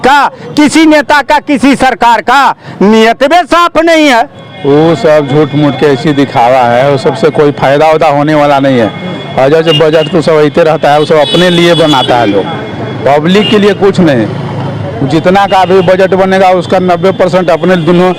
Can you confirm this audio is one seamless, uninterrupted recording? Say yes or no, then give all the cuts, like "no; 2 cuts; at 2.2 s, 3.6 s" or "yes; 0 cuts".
no; 1 cut; at 4.4 s